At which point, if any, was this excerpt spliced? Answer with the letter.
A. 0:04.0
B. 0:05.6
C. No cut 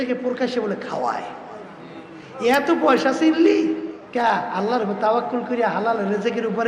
A